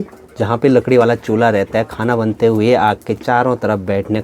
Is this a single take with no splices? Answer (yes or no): yes